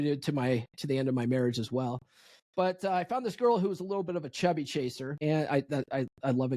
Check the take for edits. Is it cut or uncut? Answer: cut